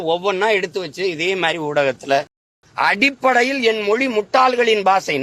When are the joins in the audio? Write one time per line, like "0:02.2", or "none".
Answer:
0:02.4